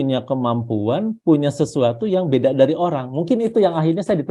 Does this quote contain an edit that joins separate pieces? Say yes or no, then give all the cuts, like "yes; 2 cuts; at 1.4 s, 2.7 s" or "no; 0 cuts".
no; 0 cuts